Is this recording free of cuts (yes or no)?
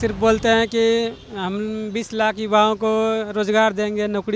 yes